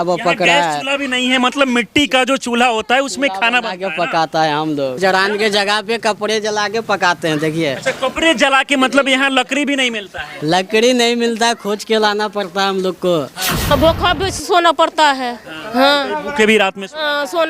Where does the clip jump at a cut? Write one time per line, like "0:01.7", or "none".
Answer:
0:05.0
0:13.7